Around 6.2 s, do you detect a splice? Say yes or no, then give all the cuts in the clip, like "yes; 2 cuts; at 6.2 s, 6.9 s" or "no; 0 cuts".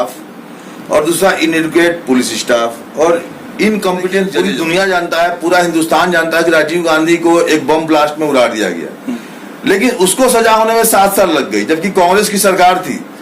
no; 1 cut; at 4.3 s